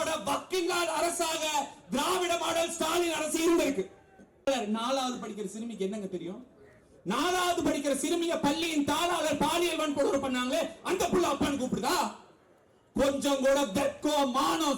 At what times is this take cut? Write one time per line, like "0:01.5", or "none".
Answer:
0:04.5